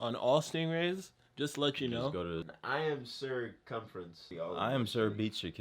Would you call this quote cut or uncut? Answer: cut